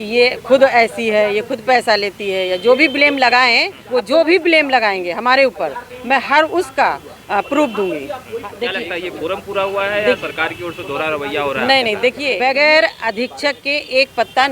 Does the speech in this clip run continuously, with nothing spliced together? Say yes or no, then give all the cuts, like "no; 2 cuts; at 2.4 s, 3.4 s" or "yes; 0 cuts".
no; 3 cuts; at 3.7 s, 8.5 s, 12.3 s